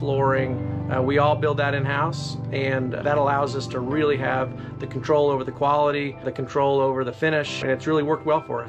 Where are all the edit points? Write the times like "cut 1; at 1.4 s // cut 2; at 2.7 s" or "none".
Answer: cut 1; at 3.0 s // cut 2; at 6.4 s // cut 3; at 7.6 s